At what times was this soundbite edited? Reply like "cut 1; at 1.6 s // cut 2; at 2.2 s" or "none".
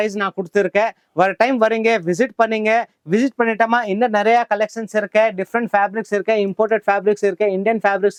none